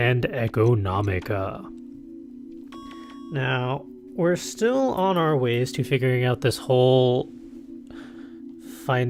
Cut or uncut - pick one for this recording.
uncut